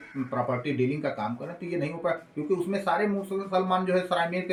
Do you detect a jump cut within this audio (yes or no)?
no